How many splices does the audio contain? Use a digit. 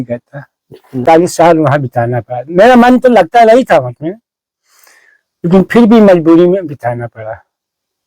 1